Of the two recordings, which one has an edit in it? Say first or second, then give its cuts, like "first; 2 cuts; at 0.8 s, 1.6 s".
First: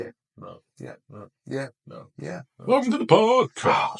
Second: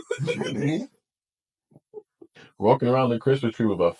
first; 1 cut; at 2.5 s